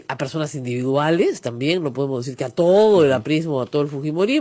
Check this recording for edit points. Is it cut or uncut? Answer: uncut